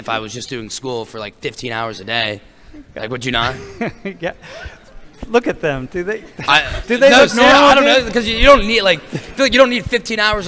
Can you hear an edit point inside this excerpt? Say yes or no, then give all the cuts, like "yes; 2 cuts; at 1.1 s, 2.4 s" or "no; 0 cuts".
no; 0 cuts